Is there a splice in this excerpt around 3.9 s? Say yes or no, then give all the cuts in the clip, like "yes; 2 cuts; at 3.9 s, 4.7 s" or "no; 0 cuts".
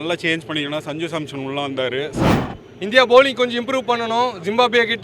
no; 1 cut; at 2.3 s